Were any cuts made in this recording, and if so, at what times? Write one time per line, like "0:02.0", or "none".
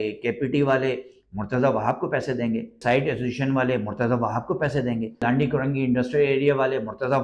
0:02.8
0:05.2